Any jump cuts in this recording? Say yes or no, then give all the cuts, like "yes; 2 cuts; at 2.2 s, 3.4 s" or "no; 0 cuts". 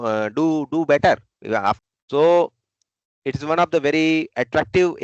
yes; 1 cut; at 1.8 s